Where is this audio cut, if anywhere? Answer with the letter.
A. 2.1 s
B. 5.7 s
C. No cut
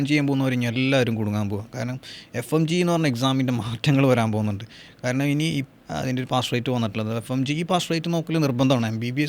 B